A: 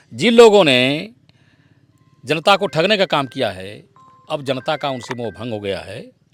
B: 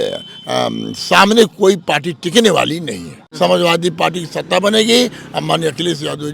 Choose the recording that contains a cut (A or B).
B